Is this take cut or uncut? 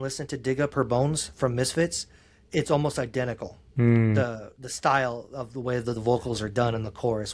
uncut